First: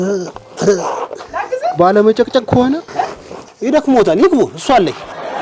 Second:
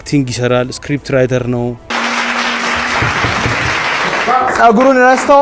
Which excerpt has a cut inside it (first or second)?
second